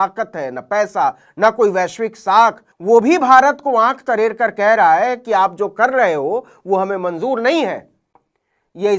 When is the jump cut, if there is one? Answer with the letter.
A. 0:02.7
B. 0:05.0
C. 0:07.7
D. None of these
D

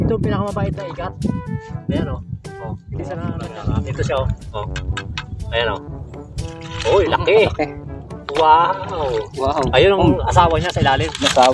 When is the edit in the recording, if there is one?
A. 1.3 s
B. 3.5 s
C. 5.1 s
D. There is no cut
B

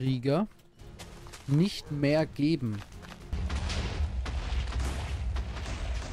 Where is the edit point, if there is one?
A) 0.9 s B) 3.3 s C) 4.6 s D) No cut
B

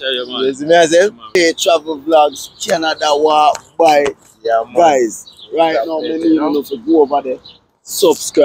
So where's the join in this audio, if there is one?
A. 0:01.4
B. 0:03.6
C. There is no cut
A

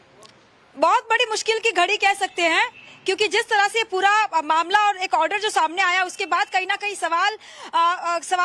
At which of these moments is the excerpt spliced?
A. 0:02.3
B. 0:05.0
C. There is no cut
B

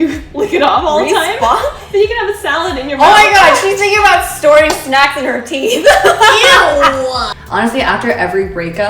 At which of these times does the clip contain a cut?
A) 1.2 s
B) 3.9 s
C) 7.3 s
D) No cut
C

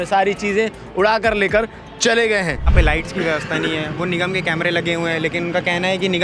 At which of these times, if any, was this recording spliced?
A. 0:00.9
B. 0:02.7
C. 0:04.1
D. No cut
B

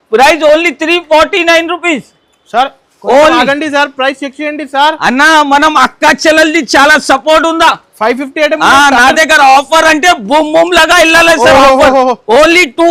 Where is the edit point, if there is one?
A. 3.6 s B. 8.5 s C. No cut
C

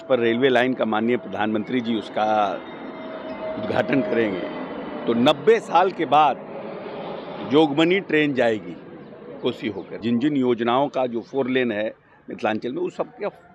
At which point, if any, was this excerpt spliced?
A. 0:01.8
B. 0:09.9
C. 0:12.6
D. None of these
B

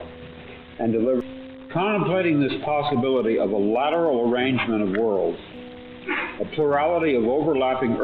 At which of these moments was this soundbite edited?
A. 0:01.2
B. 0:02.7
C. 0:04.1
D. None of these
A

